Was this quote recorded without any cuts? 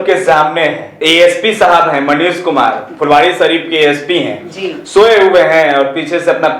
no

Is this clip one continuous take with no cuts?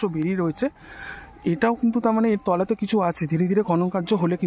yes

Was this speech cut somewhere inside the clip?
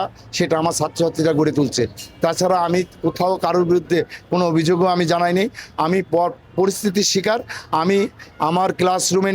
no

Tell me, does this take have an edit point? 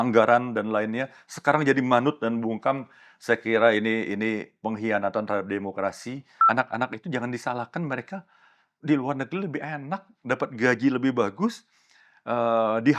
yes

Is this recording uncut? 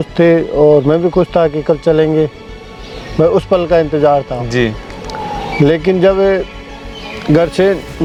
yes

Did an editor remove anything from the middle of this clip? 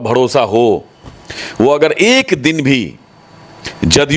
no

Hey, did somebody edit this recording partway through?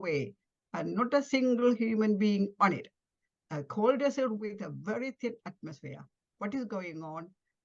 no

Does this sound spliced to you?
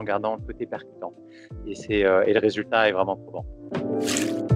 yes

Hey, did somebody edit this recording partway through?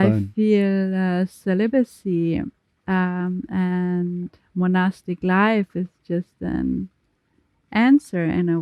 no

